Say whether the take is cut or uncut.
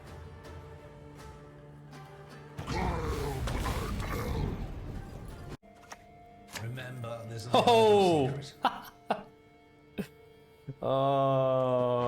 cut